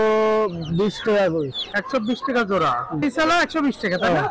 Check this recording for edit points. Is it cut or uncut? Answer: uncut